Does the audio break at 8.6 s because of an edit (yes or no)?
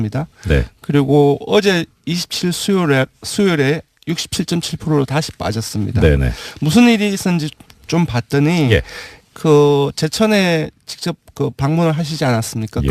yes